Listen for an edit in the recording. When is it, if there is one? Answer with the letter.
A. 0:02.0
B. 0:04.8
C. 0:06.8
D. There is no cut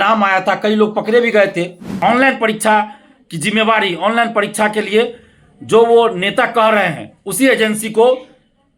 A